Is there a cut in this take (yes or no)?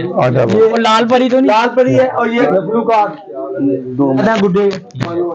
yes